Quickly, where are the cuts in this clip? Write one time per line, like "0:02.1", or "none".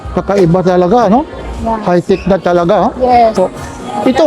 0:03.3